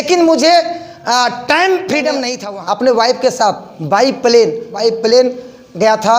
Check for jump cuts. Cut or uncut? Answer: cut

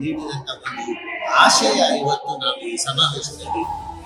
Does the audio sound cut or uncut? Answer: uncut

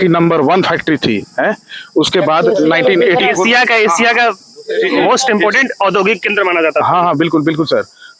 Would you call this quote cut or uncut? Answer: uncut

